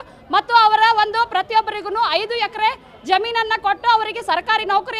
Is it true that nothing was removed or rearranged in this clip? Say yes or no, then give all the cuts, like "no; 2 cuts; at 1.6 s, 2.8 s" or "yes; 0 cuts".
yes; 0 cuts